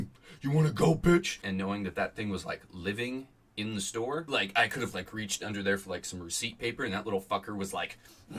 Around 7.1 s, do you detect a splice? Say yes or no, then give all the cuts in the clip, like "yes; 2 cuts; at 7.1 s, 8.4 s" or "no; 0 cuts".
no; 2 cuts; at 1.4 s, 3.9 s